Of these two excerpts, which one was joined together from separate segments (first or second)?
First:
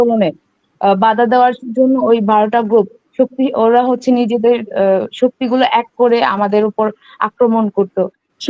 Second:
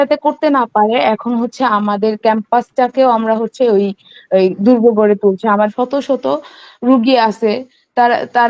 second